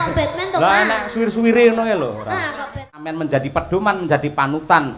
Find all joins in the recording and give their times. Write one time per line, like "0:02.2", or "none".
0:03.1